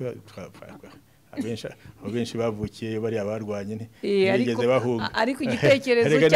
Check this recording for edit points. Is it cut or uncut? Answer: uncut